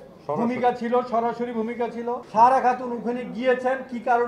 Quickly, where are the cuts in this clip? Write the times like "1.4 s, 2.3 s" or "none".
2.2 s